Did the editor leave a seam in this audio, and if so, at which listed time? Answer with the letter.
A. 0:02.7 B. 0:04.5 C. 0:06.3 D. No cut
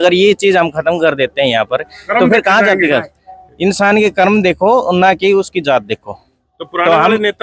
D